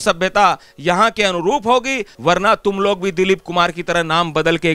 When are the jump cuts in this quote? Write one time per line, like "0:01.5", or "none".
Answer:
0:02.1